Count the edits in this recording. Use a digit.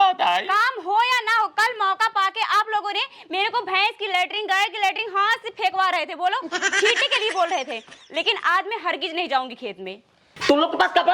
1